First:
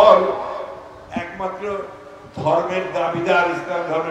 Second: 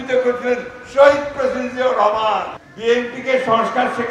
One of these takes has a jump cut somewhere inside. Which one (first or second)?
second